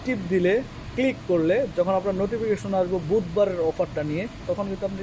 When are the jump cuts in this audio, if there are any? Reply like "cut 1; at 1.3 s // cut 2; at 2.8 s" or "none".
none